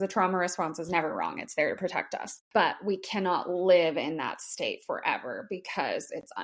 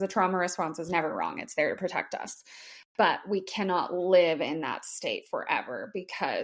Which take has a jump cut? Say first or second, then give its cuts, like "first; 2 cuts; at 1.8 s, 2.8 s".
first; 1 cut; at 2.3 s